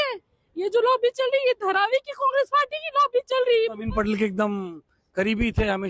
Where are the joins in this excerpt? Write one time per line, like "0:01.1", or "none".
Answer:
0:03.8